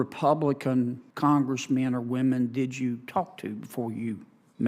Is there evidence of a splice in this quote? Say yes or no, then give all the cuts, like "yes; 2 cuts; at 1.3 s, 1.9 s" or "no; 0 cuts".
yes; 1 cut; at 1.0 s